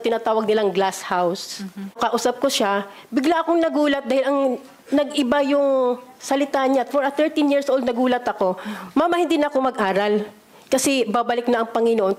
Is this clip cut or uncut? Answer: cut